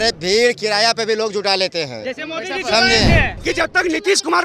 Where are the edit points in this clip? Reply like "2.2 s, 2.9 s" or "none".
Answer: 3.3 s